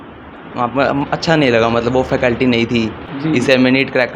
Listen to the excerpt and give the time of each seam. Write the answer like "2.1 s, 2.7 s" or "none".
3.0 s